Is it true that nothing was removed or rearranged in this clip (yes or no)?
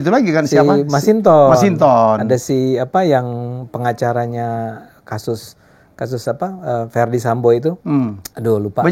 no